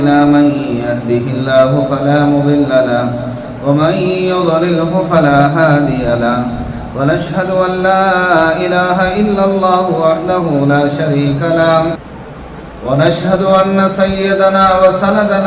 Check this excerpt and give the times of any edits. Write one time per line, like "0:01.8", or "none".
0:12.0